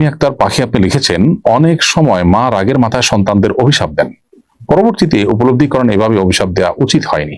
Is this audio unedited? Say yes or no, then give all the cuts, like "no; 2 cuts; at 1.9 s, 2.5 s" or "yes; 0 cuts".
yes; 0 cuts